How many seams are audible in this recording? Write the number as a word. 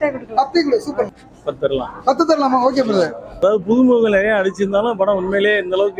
two